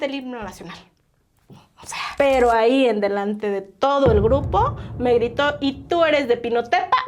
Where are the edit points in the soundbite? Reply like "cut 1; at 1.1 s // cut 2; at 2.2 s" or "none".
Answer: cut 1; at 2.0 s